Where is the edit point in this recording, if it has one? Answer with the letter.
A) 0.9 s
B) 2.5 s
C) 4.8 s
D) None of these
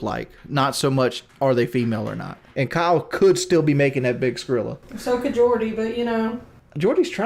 B